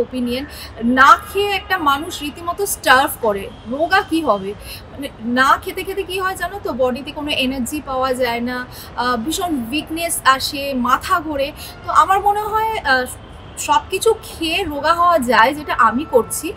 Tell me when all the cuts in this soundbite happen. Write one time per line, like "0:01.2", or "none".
none